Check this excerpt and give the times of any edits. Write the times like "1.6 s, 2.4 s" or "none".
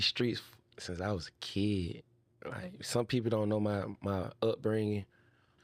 none